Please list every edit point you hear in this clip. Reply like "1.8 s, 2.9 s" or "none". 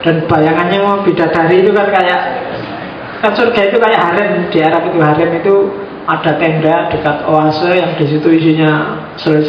none